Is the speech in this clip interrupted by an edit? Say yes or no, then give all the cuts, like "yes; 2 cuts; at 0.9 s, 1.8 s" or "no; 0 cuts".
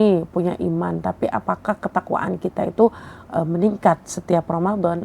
no; 0 cuts